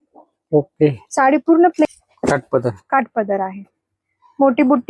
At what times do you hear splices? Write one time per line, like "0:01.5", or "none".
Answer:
0:01.8